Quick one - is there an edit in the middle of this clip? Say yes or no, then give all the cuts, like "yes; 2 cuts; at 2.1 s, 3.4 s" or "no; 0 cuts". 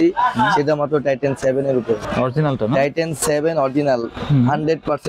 yes; 1 cut; at 2.0 s